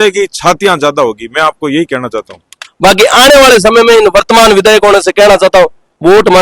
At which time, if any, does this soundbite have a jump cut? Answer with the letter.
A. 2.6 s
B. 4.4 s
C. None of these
A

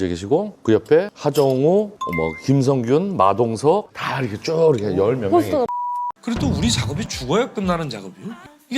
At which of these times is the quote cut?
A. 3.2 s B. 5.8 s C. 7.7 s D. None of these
B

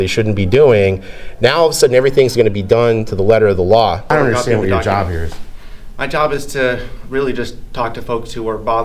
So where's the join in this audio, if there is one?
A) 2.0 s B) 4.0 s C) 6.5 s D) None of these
B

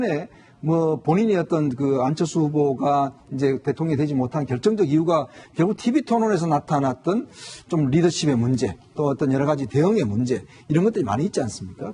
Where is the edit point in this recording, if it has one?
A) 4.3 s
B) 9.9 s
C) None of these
A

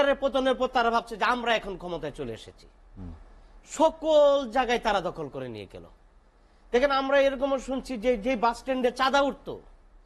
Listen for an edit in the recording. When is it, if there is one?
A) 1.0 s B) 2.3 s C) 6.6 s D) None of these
D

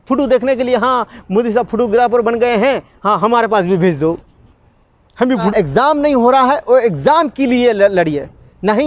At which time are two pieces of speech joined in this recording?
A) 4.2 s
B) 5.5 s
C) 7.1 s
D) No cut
B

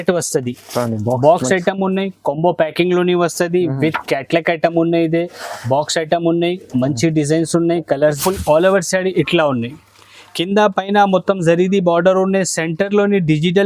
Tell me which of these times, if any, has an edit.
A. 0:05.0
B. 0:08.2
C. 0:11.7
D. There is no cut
B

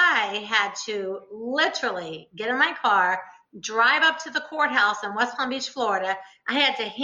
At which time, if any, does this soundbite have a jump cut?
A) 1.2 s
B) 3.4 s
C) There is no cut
C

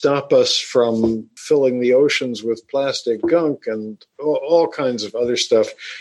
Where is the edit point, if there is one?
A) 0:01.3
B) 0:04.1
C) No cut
A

